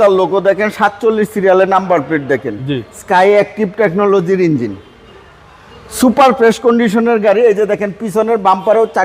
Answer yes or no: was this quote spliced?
no